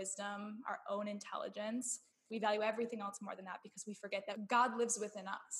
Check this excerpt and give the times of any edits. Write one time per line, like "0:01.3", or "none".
0:04.4